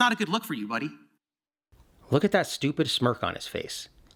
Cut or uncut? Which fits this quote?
uncut